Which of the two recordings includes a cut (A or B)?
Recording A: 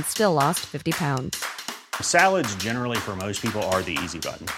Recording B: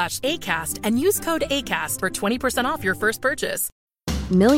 B